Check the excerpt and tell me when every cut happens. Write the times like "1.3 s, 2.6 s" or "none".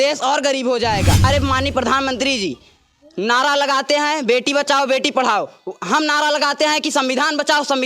1.2 s